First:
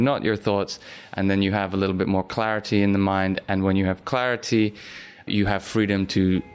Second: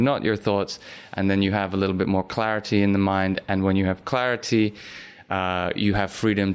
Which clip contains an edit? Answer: first; 1 cut; at 5.2 s

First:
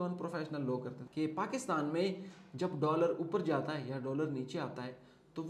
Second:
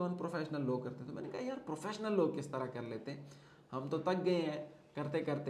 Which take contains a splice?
first; 1 cut; at 1.0 s

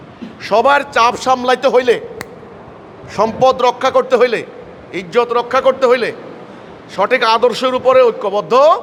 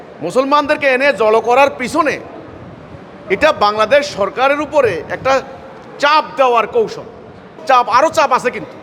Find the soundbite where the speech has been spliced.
second; 1 cut; at 7.6 s

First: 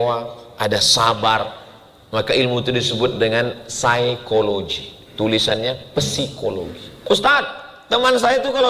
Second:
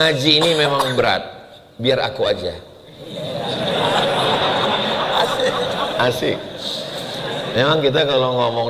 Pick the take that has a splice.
first; 1 cut; at 6.9 s

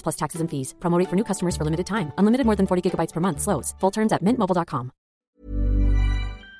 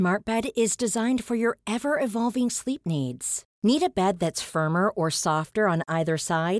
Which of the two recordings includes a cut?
first; 1 cut; at 5.1 s

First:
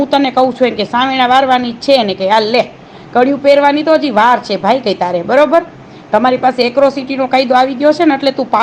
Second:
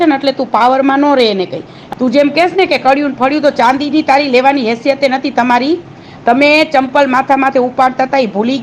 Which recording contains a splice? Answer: second; 1 cut; at 1.8 s

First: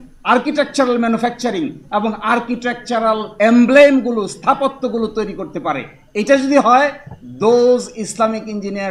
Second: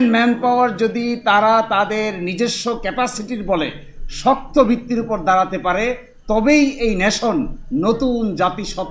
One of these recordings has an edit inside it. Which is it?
first; 1 cut; at 3.3 s

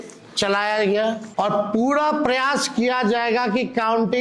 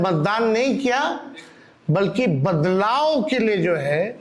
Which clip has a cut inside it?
first; 1 cut; at 1.2 s

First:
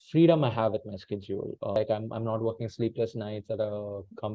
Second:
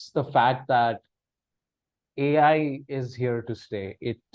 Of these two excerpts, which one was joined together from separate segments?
first; 1 cut; at 1.8 s

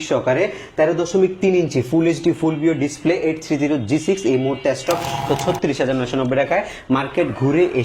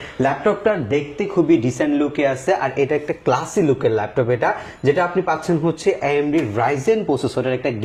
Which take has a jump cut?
first; 1 cut; at 5.2 s

